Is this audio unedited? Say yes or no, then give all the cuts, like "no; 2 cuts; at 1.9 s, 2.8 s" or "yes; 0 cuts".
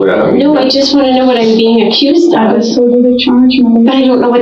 yes; 0 cuts